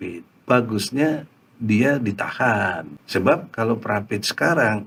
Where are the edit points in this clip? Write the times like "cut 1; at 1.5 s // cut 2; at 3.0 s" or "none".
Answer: none